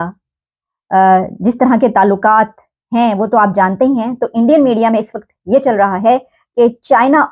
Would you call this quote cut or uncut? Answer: uncut